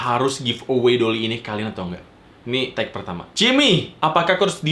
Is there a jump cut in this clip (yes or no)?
yes